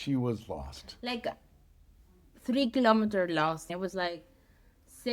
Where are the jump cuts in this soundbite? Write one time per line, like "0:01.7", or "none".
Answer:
0:03.7